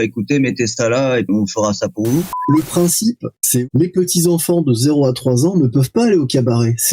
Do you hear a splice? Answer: yes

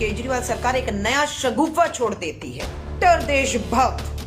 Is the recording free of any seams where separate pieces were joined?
no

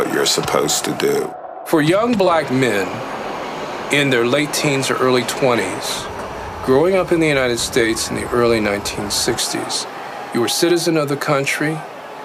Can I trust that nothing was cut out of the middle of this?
yes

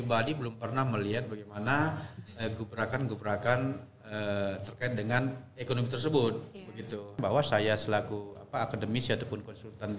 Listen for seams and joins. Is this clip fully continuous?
no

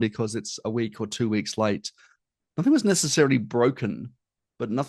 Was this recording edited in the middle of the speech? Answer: no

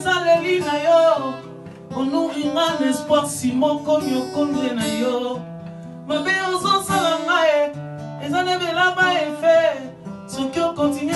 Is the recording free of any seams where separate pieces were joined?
no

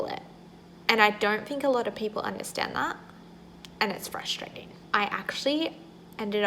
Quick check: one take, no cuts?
no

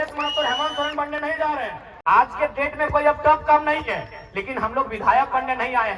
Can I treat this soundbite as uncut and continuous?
no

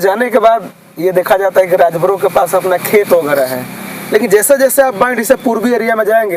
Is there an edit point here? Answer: no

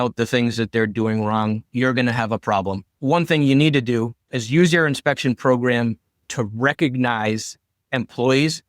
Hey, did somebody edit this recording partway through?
yes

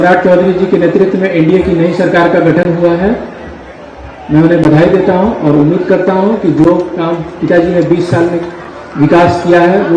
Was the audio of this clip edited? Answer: no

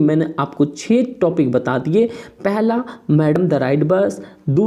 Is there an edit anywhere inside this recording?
no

